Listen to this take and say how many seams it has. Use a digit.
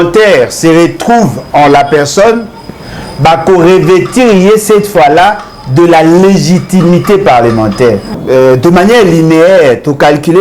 1